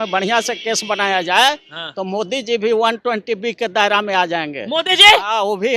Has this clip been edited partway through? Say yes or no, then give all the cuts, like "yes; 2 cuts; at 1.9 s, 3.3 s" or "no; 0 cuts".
no; 0 cuts